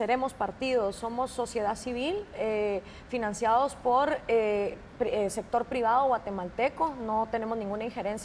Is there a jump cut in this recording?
no; 0 cuts

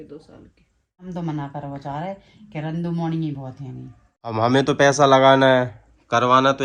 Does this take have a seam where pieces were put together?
yes; 2 cuts; at 1.1 s, 4.3 s

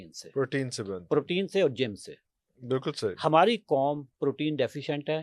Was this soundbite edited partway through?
no; 0 cuts

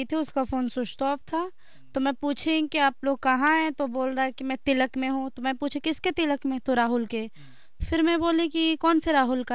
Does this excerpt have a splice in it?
no; 0 cuts

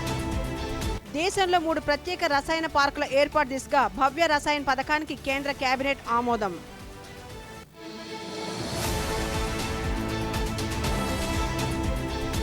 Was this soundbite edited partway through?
yes; 1 cut; at 0.9 s

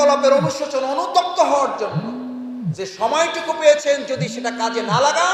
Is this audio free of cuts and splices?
yes; 0 cuts

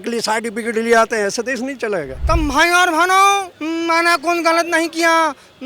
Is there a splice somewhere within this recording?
yes; 2 cuts; at 2.1 s, 3.5 s

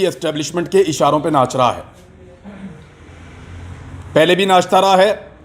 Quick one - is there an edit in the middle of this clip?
no; 0 cuts

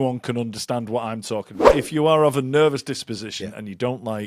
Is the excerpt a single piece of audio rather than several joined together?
no; 1 cut; at 1.7 s

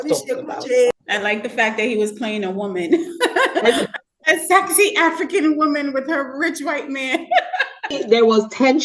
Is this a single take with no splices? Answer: no; 2 cuts; at 0.9 s, 7.9 s

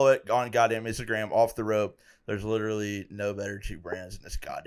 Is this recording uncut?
yes; 0 cuts

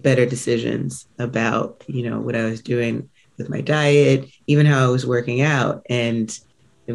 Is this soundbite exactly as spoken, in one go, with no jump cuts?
yes; 0 cuts

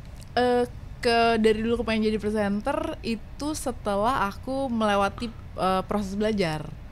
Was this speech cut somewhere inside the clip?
no; 0 cuts

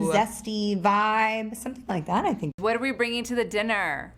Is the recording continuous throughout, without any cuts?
yes; 0 cuts

